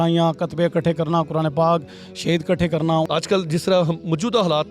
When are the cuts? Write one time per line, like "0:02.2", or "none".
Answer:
0:03.1